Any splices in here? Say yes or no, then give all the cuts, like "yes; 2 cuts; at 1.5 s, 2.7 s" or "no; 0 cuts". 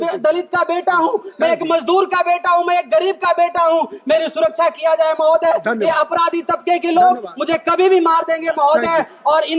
no; 0 cuts